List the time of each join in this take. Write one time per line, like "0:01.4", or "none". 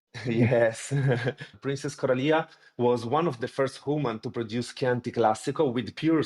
0:01.5